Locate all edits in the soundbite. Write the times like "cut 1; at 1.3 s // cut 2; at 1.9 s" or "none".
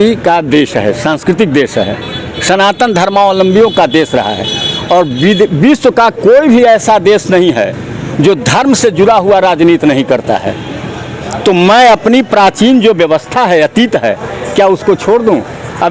none